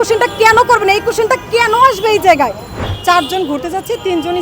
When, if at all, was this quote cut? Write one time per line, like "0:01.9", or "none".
0:02.9